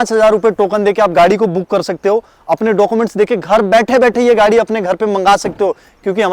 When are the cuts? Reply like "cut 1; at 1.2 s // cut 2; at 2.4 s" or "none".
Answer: none